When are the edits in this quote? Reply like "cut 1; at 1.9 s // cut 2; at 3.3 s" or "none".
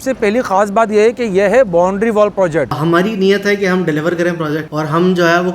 cut 1; at 2.8 s // cut 2; at 4.7 s